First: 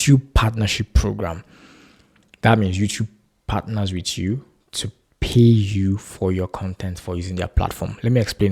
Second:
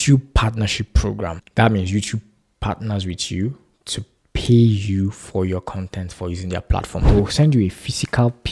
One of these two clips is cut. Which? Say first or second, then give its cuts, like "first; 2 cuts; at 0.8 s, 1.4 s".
second; 2 cuts; at 1.4 s, 7.0 s